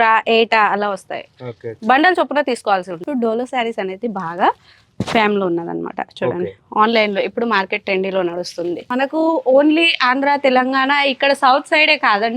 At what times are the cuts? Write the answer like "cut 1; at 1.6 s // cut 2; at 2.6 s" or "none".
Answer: cut 1; at 3.1 s // cut 2; at 8.8 s